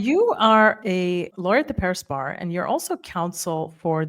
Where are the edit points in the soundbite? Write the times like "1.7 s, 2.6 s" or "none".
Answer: 1.3 s